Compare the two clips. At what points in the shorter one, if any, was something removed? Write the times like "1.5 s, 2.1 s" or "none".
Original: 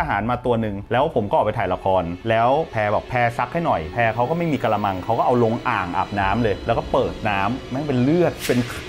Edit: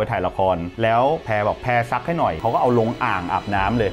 2.4 s